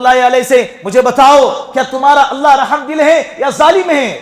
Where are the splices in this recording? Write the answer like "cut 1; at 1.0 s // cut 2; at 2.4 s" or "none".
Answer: none